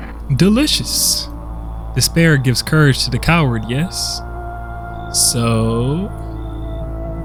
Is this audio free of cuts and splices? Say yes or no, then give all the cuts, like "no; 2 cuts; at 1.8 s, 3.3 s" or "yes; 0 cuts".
yes; 0 cuts